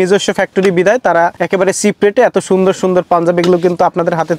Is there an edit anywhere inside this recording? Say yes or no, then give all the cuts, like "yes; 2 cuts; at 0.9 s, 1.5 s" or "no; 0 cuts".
yes; 1 cut; at 1.4 s